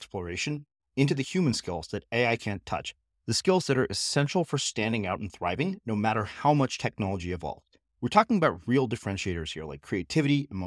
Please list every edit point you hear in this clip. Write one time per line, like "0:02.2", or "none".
none